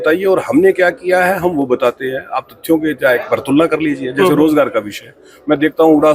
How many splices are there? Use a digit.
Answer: 0